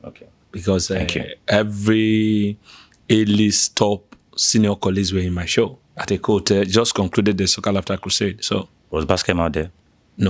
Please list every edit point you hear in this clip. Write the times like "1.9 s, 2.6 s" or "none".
none